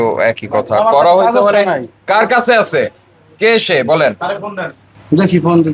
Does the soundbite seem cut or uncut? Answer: uncut